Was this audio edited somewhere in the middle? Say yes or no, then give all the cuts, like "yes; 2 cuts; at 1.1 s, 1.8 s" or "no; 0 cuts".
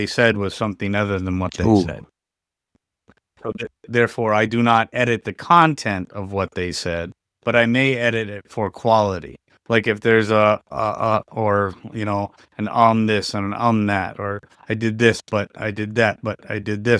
no; 0 cuts